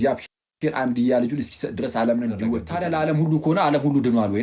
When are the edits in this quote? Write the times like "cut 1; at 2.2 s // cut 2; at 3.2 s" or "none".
cut 1; at 0.9 s // cut 2; at 2.7 s